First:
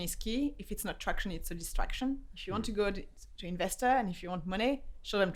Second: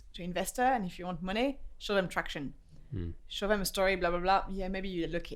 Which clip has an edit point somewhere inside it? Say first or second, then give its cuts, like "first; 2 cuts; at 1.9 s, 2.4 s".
first; 1 cut; at 2.3 s